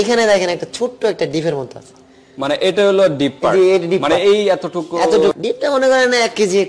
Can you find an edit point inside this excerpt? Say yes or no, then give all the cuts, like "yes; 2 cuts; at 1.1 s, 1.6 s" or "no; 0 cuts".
yes; 1 cut; at 5.3 s